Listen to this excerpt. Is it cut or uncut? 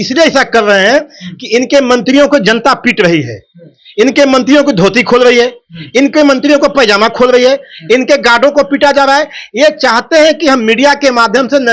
uncut